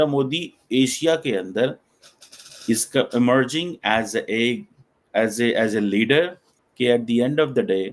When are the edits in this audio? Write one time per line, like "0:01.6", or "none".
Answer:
none